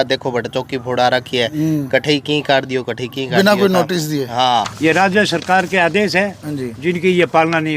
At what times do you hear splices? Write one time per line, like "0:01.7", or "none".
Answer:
0:04.7